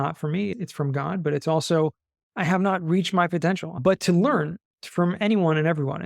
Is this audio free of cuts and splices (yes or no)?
no